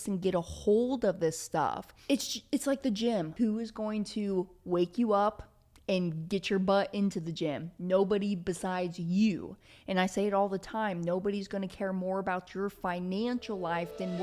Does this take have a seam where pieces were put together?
yes; 2 cuts; at 1.9 s, 3.3 s

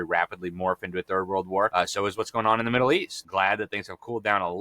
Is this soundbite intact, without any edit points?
no; 2 cuts; at 1.7 s, 3.2 s

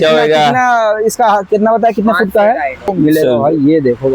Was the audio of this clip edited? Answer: yes; 1 cut; at 2.8 s

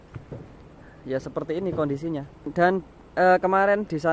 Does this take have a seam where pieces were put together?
yes; 1 cut; at 2.5 s

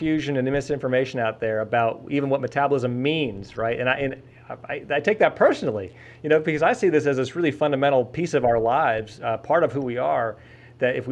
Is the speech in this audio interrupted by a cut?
no; 0 cuts

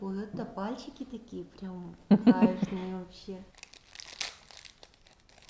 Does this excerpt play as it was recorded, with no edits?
no; 1 cut; at 3.5 s

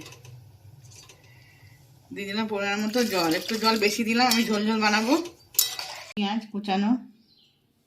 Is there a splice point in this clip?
yes; 1 cut; at 6.2 s

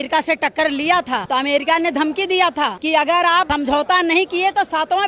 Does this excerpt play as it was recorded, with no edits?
no; 3 cuts; at 1.2 s, 2.8 s, 3.5 s

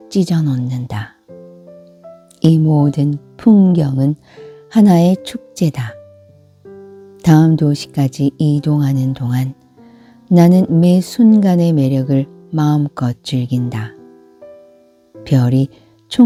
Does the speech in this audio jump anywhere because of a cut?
no; 0 cuts

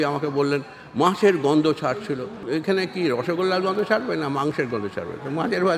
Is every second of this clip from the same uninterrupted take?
no; 1 cut; at 2.4 s

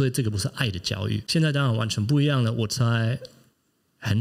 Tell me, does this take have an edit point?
yes; 1 cut; at 1.2 s

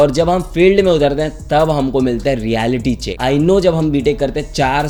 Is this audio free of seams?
yes; 0 cuts

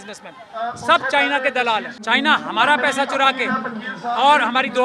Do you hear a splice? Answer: yes; 1 cut; at 2.0 s

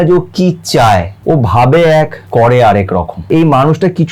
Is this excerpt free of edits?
no; 3 cuts; at 1.1 s, 2.2 s, 3.3 s

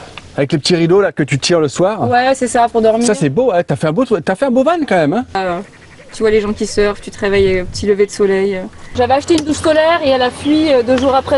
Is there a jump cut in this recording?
yes; 2 cuts; at 5.4 s, 8.8 s

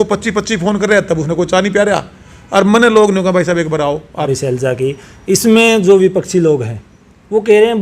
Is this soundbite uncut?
no; 1 cut; at 4.3 s

